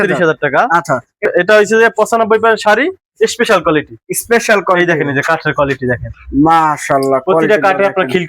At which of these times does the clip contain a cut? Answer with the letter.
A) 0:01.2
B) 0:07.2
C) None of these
A